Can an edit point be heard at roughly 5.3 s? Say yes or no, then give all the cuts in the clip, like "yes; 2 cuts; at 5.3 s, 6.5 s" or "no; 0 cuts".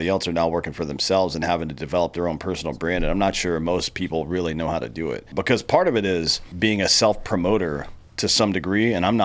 yes; 2 cuts; at 5.3 s, 6.4 s